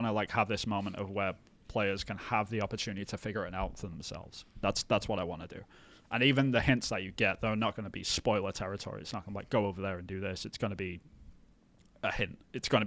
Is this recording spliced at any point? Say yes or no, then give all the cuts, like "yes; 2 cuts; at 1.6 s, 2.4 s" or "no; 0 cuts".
no; 0 cuts